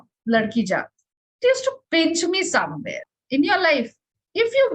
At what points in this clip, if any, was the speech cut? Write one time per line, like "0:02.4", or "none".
0:03.1